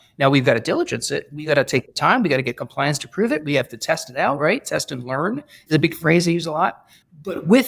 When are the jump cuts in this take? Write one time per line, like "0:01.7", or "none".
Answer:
none